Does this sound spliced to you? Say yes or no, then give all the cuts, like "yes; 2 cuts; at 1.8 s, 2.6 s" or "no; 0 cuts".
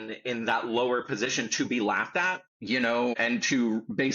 yes; 2 cuts; at 2.5 s, 3.2 s